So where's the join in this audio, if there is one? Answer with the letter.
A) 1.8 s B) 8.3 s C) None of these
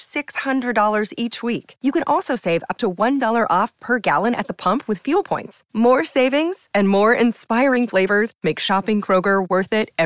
C